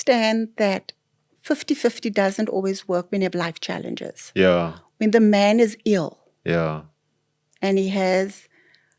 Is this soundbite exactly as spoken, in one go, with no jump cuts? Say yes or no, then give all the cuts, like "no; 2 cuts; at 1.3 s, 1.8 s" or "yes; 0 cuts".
yes; 0 cuts